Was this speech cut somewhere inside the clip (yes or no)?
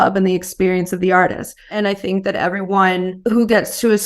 yes